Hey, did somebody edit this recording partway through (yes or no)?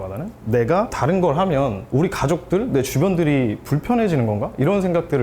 yes